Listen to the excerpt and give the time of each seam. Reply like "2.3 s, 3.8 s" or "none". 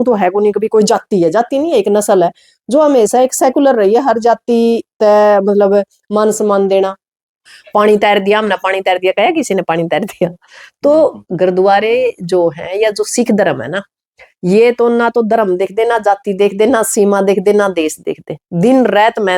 7.6 s